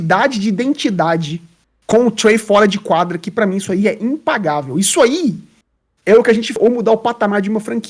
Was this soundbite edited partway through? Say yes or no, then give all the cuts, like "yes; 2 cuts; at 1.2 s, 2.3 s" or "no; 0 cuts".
yes; 1 cut; at 6.5 s